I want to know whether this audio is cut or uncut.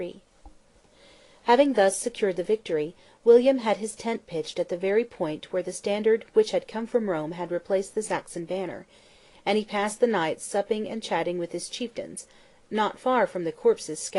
cut